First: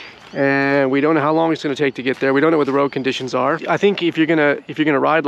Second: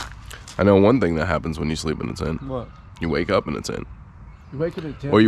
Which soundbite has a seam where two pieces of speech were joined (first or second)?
first